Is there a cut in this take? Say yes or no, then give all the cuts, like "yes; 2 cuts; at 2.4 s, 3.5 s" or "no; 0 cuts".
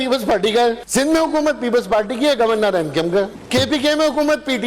yes; 2 cuts; at 0.8 s, 3.4 s